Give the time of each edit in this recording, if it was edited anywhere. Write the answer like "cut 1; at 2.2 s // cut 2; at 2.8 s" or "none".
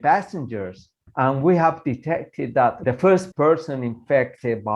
cut 1; at 3.3 s